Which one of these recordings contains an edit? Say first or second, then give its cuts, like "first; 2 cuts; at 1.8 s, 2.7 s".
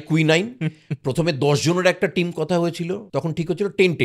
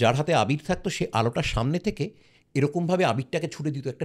first; 1 cut; at 3.0 s